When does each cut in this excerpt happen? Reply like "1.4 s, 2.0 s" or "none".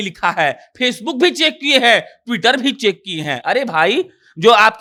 none